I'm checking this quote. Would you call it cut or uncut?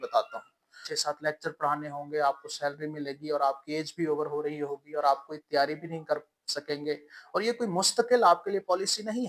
cut